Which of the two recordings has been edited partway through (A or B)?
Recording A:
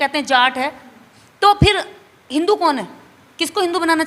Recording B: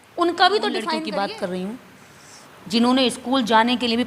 B